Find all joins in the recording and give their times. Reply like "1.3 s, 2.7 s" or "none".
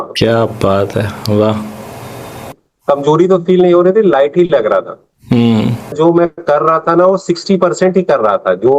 2.5 s, 5.9 s